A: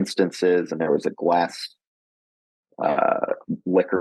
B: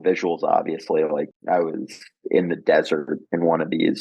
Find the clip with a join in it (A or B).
B